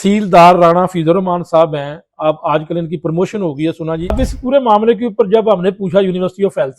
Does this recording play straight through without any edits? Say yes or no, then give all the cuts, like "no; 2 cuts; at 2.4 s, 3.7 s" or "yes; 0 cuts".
no; 1 cut; at 4.1 s